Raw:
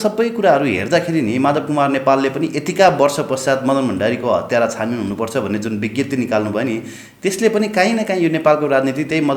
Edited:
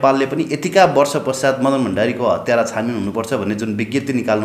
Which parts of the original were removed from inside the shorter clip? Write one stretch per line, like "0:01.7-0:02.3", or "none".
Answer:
none